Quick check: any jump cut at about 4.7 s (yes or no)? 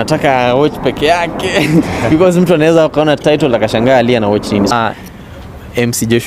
yes